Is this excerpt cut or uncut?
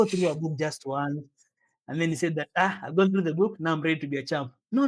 uncut